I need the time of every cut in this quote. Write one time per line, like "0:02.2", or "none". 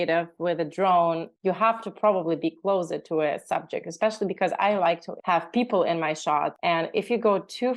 0:01.3
0:05.1
0:06.6